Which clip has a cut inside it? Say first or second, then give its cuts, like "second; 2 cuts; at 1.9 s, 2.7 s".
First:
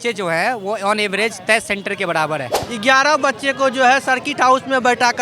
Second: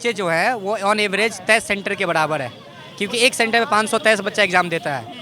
first; 1 cut; at 2.6 s